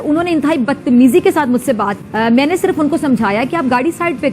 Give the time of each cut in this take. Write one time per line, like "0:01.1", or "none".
0:02.0